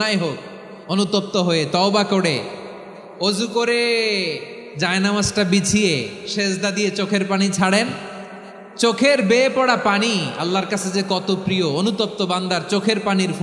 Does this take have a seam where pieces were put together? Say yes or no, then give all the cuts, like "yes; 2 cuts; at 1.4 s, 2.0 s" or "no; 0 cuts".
no; 0 cuts